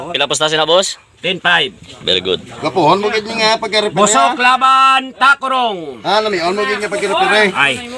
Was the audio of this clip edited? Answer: no; 0 cuts

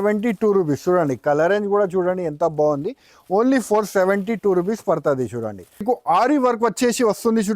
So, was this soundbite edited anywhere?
yes; 1 cut; at 5.8 s

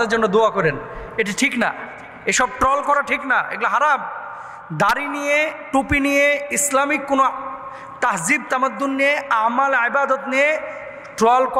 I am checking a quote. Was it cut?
no; 0 cuts

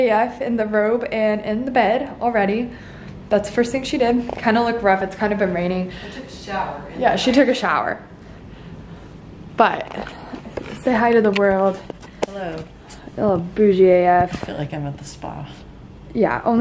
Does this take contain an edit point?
no; 0 cuts

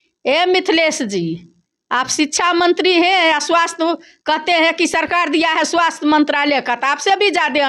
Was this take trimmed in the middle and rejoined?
no; 0 cuts

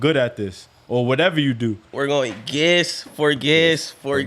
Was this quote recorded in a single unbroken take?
no; 1 cut; at 1.9 s

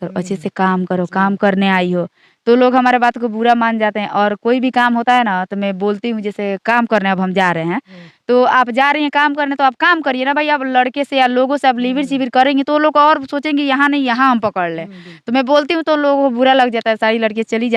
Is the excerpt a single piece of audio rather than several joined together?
yes; 0 cuts

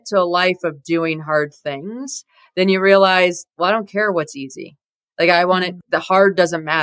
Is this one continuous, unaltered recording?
yes; 0 cuts

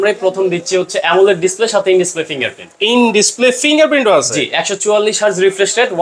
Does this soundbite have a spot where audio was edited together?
no; 0 cuts

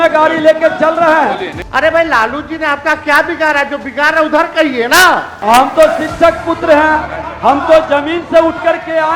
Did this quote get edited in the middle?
yes; 2 cuts; at 1.5 s, 5.3 s

